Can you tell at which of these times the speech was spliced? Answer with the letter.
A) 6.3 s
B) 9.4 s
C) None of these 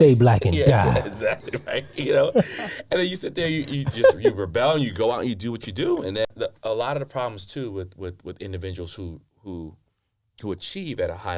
A